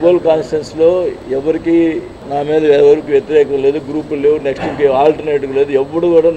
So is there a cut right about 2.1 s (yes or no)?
yes